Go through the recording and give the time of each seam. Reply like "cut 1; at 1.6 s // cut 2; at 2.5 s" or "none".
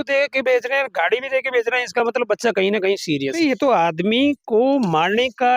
cut 1; at 3.3 s